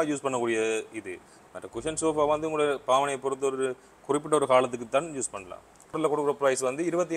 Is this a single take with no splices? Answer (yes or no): no